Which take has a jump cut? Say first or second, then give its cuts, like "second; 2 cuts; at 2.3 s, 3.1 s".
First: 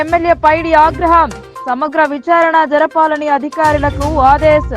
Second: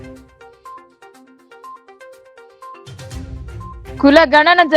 second; 2 cuts; at 1.8 s, 4.0 s